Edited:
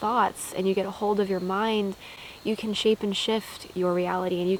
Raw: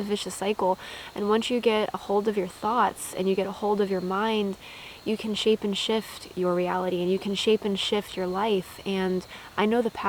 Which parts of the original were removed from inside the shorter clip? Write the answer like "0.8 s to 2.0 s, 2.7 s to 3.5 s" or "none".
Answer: none